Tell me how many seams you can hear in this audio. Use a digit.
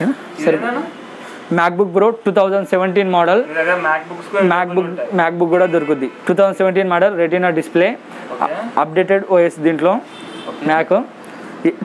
0